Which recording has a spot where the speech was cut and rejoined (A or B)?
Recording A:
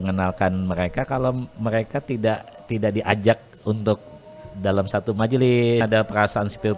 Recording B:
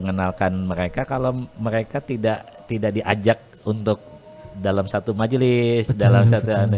A